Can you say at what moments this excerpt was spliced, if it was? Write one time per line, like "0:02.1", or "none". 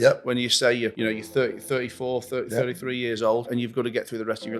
0:00.9
0:03.5

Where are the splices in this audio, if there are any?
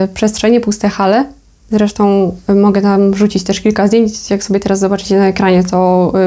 none

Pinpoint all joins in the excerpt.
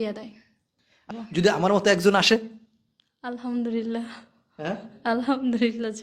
0:01.1

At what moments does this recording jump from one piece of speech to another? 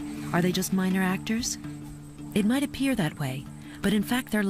none

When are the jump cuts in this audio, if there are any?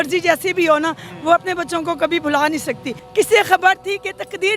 0:03.0

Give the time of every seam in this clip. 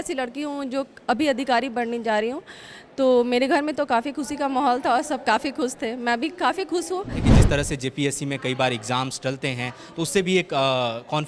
0:07.3

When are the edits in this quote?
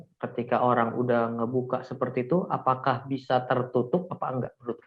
none

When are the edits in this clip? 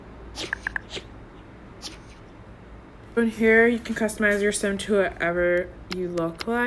0:03.2

